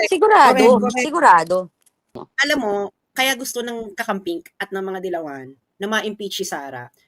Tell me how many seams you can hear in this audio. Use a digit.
1